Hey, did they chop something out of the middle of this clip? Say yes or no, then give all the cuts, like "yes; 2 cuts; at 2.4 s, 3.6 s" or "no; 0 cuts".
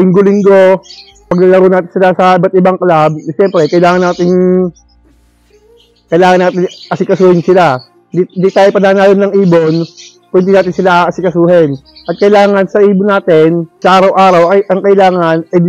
yes; 1 cut; at 1.3 s